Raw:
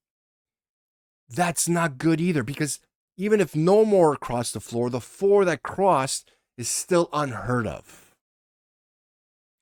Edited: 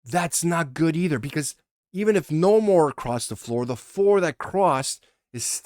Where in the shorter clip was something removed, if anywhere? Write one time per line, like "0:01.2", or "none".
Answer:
none